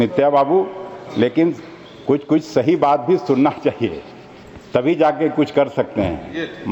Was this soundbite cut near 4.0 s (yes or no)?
no